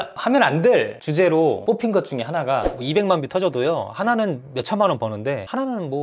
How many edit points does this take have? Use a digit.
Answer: 1